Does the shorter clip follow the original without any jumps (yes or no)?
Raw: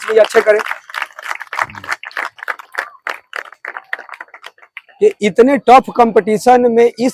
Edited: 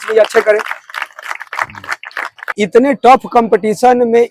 no